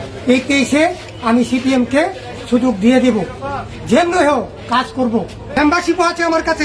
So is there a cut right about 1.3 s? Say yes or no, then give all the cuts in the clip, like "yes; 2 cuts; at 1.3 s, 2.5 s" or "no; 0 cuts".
no; 1 cut; at 5.4 s